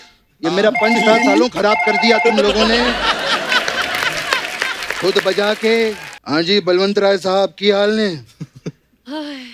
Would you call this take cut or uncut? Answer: cut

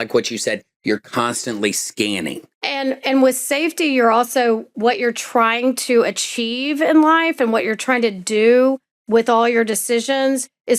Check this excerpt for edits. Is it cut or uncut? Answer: cut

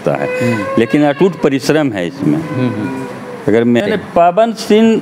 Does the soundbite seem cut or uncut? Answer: cut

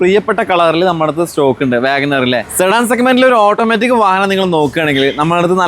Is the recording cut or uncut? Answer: cut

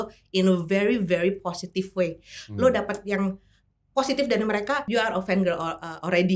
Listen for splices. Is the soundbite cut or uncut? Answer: cut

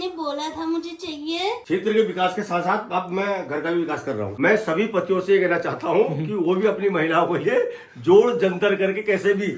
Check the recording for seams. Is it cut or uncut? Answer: cut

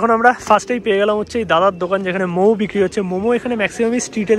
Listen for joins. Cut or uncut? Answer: uncut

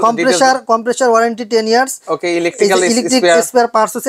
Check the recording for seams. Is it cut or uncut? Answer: uncut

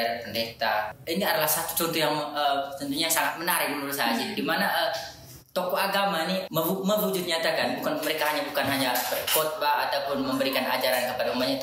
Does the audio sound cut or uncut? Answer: cut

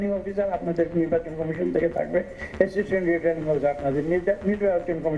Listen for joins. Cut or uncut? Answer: uncut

